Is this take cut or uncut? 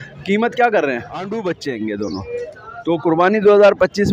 cut